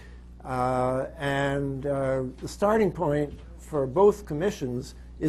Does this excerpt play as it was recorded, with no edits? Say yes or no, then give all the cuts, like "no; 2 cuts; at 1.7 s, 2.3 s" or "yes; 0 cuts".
no; 1 cut; at 4.1 s